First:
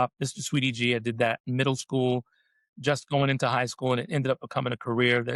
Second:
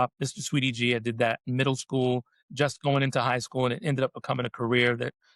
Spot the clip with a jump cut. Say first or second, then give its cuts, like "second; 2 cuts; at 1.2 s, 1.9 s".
second; 1 cut; at 2.4 s